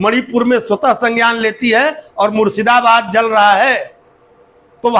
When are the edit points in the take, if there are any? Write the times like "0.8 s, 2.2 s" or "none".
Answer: none